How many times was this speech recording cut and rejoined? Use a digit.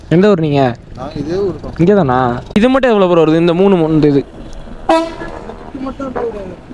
1